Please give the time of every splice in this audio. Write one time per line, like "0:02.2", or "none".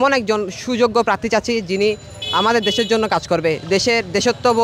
none